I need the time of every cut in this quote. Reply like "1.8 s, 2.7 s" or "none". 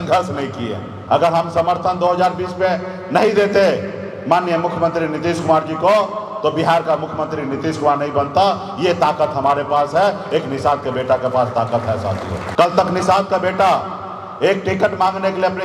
0.9 s, 12.3 s